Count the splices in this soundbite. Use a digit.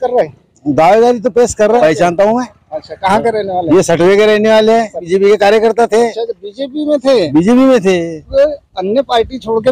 3